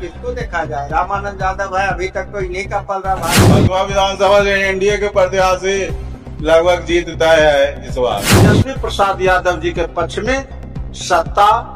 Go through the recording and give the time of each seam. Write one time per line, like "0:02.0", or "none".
0:03.5
0:08.4